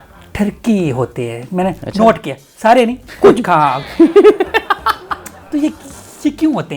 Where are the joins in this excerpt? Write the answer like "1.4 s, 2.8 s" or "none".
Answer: 5.4 s